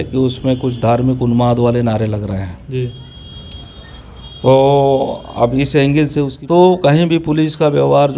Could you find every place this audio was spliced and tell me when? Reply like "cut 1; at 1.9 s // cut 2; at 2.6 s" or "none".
cut 1; at 6.4 s